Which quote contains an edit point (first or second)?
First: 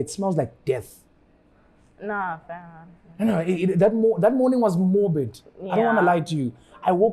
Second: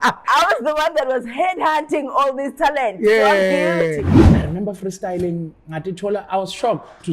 second